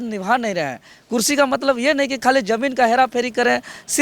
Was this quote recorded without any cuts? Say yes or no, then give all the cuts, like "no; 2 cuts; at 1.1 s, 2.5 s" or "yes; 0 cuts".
yes; 0 cuts